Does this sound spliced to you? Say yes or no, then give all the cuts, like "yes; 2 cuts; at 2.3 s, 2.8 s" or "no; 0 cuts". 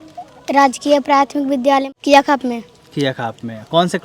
yes; 1 cut; at 1.9 s